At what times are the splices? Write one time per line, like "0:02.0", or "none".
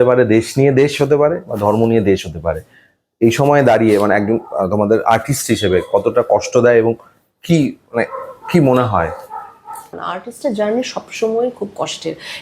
0:09.9